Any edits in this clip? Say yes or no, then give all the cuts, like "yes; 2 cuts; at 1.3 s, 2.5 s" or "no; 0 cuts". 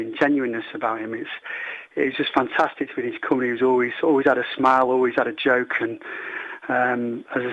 no; 0 cuts